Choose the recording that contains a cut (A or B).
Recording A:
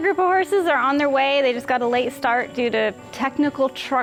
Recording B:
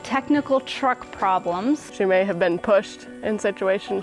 B